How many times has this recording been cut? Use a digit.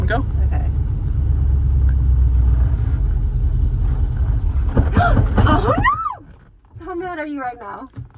0